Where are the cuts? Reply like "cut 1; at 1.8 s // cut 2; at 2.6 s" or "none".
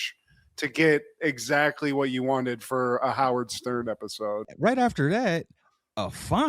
cut 1; at 4.5 s